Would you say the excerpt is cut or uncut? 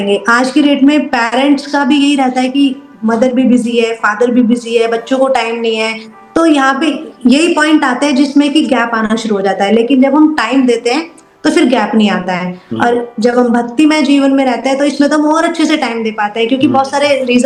uncut